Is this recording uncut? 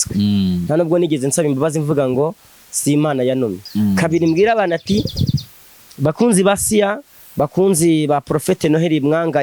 no; 1 cut; at 3.6 s

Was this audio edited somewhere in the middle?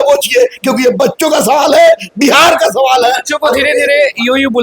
no; 0 cuts

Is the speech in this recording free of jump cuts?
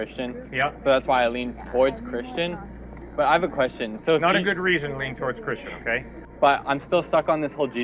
no; 1 cut; at 6.2 s

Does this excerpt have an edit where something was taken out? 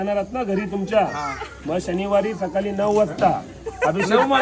no; 0 cuts

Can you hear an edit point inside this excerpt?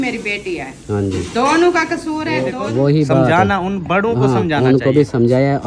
yes; 1 cut; at 2.5 s

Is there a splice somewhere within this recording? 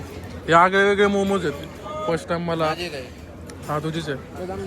no; 0 cuts

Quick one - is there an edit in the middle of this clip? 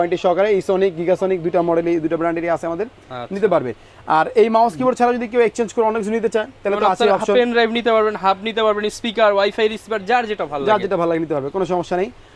no; 0 cuts

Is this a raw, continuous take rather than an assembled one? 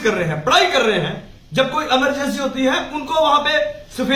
yes; 0 cuts

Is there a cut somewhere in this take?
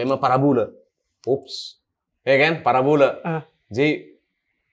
no; 0 cuts

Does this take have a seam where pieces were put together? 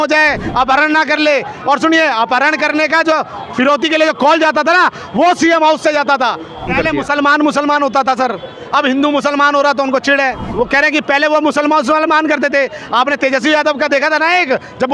yes; 2 cuts; at 6.7 s, 10.4 s

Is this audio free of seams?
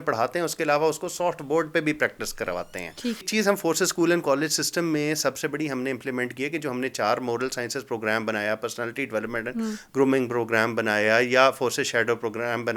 no; 1 cut; at 3.3 s

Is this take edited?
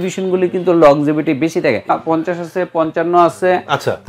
yes; 1 cut; at 1.9 s

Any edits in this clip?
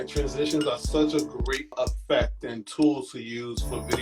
yes; 1 cut; at 1.8 s

